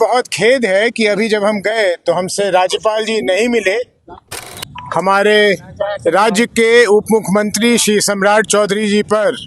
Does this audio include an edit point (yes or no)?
yes